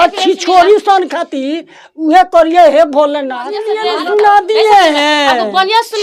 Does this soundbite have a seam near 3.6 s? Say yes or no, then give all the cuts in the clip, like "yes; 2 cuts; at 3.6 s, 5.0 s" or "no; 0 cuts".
yes; 1 cut; at 3.6 s